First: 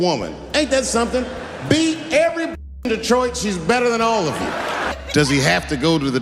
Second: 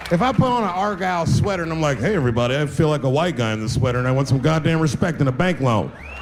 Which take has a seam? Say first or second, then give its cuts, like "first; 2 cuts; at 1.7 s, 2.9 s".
first; 1 cut; at 4.7 s